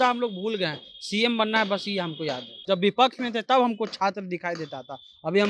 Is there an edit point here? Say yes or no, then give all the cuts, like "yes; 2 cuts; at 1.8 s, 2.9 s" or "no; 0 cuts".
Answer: yes; 1 cut; at 2.5 s